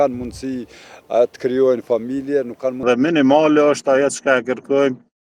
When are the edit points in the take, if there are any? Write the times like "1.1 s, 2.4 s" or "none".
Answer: 2.8 s